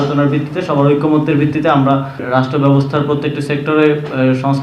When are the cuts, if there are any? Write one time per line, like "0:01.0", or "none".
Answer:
0:02.2